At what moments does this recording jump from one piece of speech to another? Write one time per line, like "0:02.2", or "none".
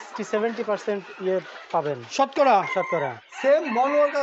0:03.3